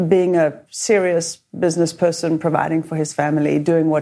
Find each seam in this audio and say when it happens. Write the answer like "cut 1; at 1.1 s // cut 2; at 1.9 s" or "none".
none